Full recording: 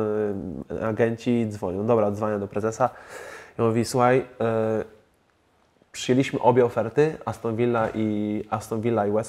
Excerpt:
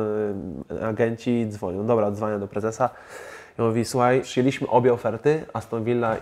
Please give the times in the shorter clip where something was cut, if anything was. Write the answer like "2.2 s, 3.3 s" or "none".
4.3 s